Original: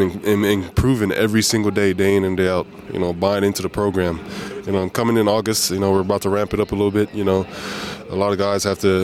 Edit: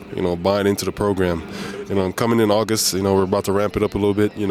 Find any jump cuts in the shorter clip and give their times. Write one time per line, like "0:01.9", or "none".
none